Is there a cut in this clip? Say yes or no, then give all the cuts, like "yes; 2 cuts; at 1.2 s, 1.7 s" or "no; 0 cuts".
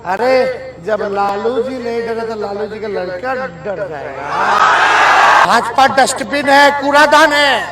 yes; 1 cut; at 5.5 s